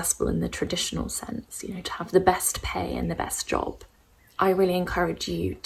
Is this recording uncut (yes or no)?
yes